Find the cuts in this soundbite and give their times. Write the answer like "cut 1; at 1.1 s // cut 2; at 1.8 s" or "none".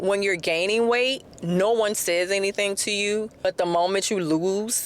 cut 1; at 1.3 s // cut 2; at 3.3 s